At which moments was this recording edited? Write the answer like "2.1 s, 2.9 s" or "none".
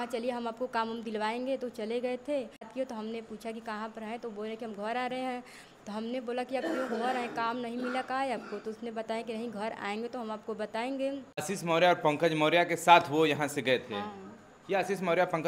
2.7 s, 11.4 s